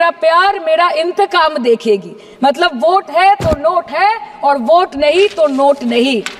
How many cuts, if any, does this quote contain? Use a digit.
0